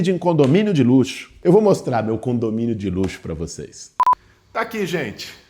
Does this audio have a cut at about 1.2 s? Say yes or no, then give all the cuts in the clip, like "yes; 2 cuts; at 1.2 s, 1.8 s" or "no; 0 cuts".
yes; 1 cut; at 1.2 s